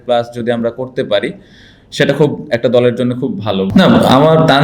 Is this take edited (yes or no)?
yes